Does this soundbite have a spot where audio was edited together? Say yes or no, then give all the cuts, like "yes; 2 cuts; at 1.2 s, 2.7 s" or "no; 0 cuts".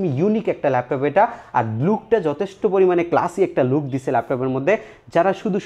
no; 0 cuts